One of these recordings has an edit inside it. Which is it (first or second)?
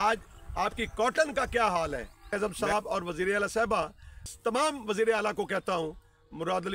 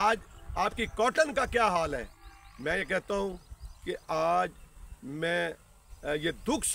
first